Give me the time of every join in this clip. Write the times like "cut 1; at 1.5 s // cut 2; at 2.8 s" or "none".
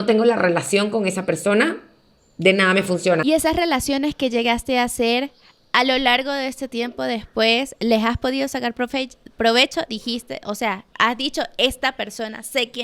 cut 1; at 3.2 s